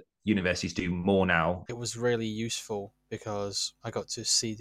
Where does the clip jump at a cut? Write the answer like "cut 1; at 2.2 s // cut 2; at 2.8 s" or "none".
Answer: cut 1; at 1.7 s // cut 2; at 3.7 s